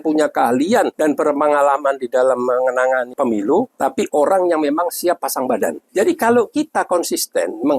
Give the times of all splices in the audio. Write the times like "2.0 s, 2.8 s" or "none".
0.9 s, 3.1 s, 3.7 s, 5.8 s